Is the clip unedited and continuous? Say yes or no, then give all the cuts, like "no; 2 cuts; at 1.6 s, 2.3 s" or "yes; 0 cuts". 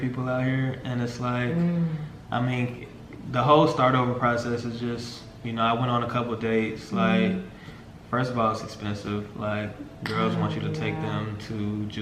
yes; 0 cuts